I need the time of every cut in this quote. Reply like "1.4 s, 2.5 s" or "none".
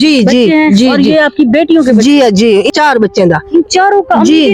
2.7 s

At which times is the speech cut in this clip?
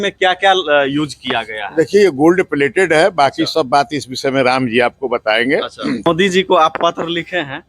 6.1 s

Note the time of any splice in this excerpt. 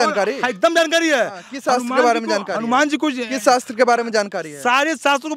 none

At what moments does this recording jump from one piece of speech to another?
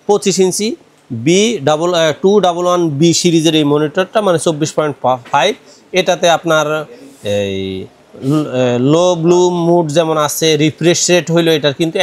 none

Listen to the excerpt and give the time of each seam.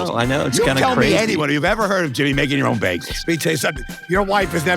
3.6 s

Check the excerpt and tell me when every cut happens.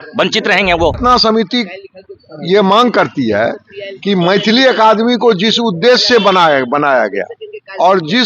1.0 s

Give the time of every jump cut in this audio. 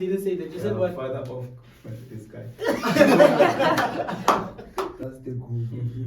5.0 s

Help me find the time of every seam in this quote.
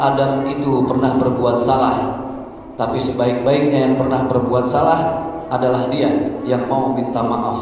none

